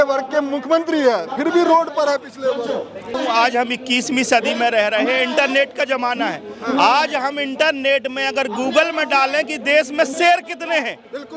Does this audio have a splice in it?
yes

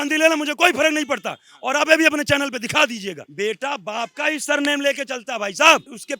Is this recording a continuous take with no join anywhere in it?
no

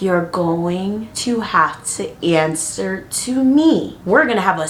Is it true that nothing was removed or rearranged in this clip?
yes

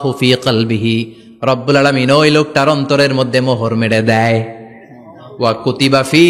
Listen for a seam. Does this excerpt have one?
no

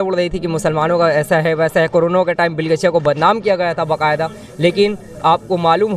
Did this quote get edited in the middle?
no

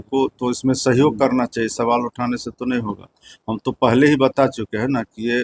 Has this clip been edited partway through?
no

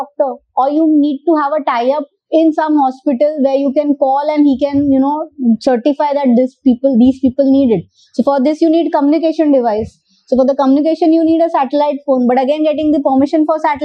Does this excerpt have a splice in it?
no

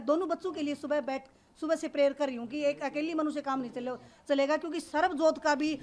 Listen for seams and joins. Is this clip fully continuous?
yes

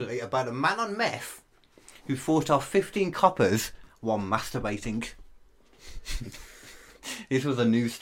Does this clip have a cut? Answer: no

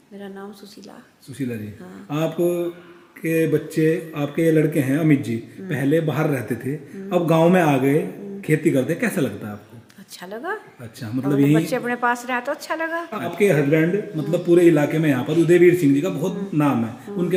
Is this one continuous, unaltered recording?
yes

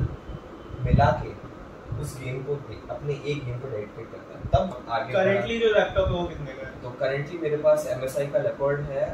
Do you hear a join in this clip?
yes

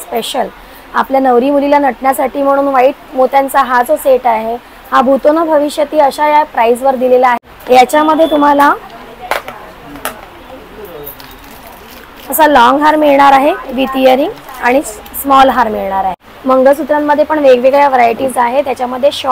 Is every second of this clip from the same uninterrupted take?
no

